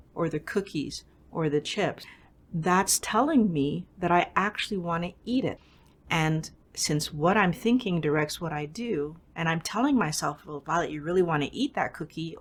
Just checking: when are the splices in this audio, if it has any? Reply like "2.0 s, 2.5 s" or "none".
none